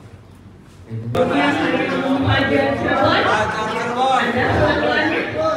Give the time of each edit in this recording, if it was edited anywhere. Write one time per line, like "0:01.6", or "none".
0:01.1